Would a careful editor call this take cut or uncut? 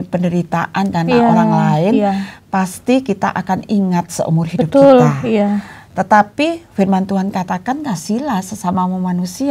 uncut